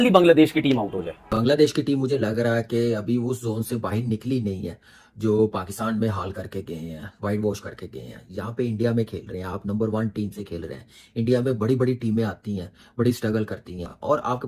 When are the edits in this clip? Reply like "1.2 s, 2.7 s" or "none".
none